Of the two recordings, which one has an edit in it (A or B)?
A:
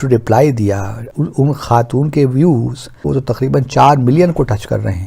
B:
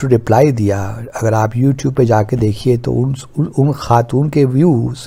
A